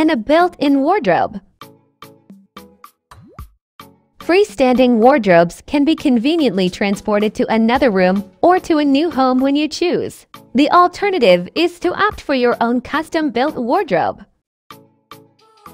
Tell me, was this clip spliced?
yes; 2 cuts; at 1.8 s, 4.2 s

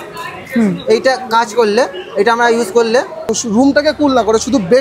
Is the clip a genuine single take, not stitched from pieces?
no; 1 cut; at 3.3 s

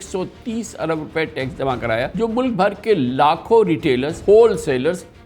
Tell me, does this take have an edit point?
yes; 2 cuts; at 2.1 s, 4.1 s

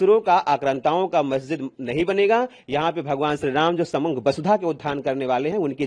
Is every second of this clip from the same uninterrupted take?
yes; 0 cuts

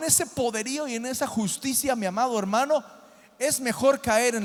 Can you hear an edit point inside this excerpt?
no; 0 cuts

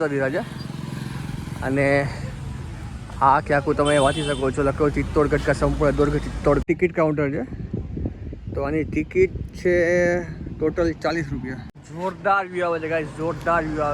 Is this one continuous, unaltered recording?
no; 2 cuts; at 6.6 s, 11.9 s

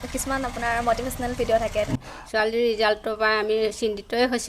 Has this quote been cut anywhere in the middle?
yes; 1 cut; at 1.9 s

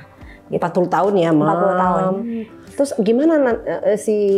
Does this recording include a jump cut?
yes; 1 cut; at 2.2 s

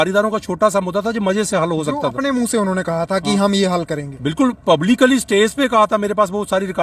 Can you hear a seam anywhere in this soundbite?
no; 0 cuts

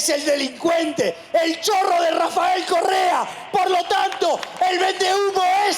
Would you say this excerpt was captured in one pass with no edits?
yes; 0 cuts

